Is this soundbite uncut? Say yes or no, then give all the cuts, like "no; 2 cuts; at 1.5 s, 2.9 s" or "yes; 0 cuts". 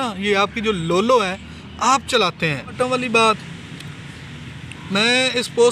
no; 1 cut; at 2.7 s